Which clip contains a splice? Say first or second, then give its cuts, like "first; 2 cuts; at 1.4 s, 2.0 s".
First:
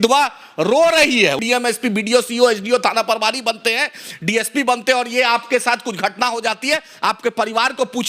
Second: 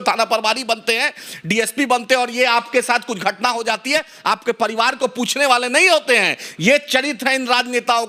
first; 1 cut; at 1.4 s